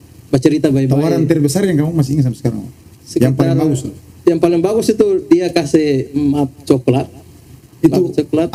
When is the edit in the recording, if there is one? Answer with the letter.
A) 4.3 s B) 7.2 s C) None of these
C